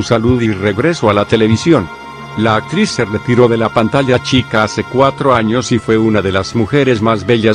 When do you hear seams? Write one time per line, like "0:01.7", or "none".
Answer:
0:01.9